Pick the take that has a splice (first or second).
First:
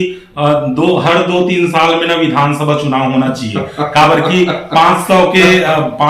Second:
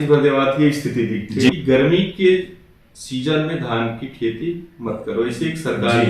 second